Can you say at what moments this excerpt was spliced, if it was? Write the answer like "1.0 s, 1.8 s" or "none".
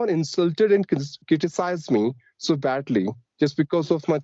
none